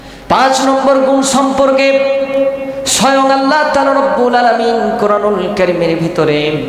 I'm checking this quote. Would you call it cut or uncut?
uncut